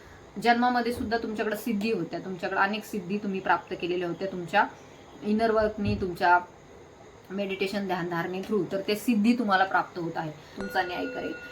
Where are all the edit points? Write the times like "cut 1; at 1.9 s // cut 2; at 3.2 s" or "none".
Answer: cut 1; at 10.6 s